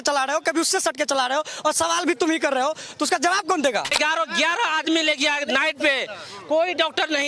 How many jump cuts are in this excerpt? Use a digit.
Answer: 1